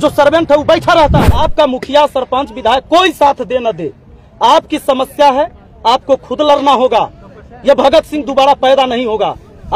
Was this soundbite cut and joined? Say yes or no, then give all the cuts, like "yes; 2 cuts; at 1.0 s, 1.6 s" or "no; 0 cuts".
yes; 1 cut; at 1.4 s